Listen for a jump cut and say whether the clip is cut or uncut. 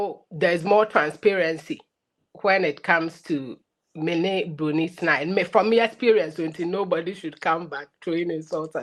uncut